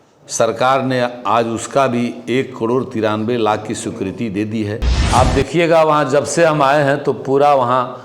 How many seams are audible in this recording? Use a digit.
1